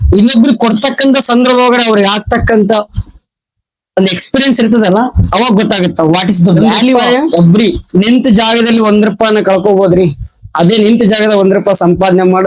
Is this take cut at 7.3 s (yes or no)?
yes